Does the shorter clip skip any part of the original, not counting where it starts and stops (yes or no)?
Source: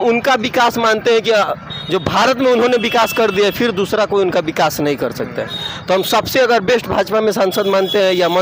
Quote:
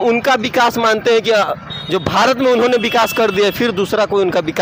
no